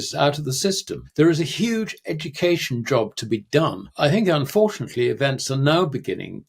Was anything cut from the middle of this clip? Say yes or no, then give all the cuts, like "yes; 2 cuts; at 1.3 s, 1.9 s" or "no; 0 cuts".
yes; 2 cuts; at 0.9 s, 3.8 s